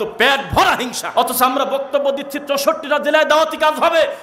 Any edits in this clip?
yes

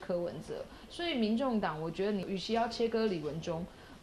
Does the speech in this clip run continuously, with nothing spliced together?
no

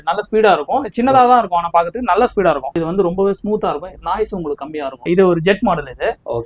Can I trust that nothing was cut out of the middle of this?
no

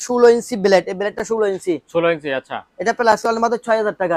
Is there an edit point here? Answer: no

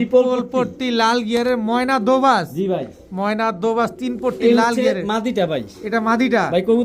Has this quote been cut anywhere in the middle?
no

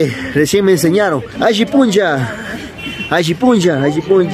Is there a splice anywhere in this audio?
yes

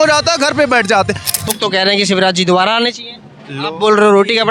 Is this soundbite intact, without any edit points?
no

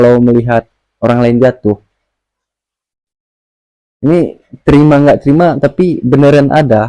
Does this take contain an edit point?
no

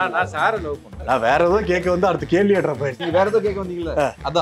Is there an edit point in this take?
yes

